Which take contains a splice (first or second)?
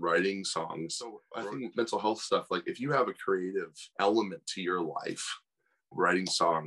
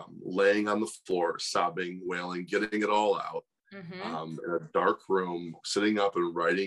first